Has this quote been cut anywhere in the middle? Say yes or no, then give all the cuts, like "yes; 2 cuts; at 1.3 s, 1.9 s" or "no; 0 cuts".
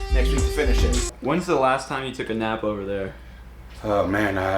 yes; 1 cut; at 1.1 s